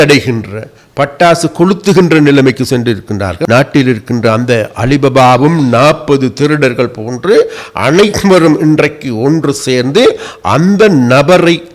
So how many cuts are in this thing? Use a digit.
1